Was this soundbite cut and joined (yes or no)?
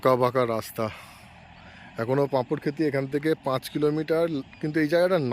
no